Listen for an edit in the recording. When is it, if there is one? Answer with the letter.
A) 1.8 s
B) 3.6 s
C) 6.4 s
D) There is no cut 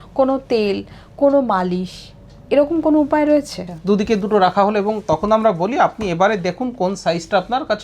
B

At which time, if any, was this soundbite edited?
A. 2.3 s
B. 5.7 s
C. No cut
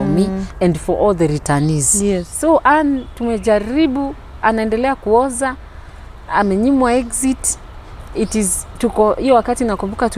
A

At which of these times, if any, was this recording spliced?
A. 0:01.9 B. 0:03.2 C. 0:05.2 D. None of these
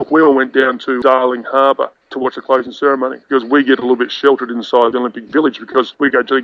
B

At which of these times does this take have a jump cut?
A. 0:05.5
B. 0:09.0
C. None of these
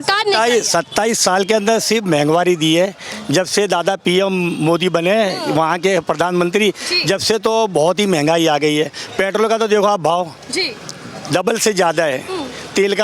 C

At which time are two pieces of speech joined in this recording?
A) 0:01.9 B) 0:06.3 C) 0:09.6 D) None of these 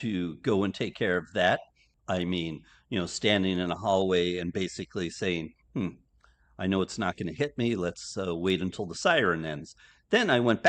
A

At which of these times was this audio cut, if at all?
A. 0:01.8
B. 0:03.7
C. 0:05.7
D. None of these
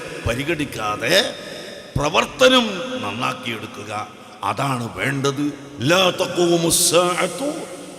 C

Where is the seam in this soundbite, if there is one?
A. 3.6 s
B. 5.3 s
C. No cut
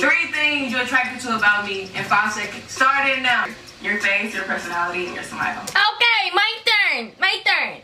A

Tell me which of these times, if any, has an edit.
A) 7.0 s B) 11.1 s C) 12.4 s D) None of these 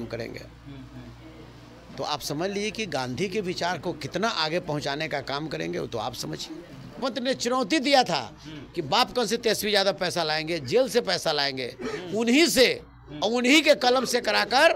A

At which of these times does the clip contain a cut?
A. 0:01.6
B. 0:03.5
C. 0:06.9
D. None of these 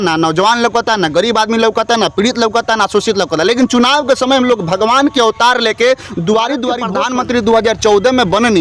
C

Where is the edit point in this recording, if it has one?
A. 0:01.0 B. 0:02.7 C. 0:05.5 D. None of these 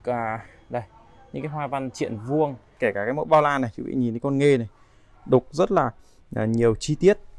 B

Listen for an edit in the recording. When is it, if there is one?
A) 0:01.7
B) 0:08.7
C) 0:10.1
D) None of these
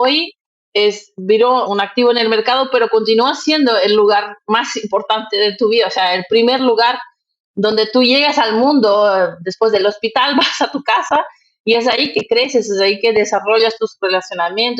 A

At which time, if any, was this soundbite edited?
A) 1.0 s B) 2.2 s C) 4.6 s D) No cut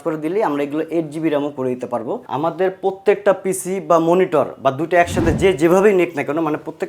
B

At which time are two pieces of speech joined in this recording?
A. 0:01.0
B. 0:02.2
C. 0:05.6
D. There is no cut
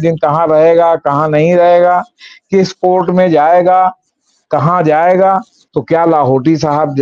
C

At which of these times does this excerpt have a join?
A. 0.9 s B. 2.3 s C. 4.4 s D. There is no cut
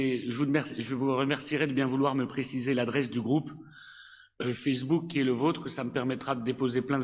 D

